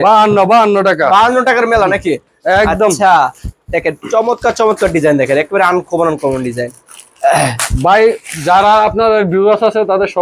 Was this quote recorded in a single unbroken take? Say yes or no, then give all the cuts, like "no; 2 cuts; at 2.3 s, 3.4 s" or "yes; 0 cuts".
yes; 0 cuts